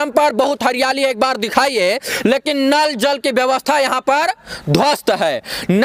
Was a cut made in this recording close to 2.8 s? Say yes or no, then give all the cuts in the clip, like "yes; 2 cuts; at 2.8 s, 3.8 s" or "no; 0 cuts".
no; 0 cuts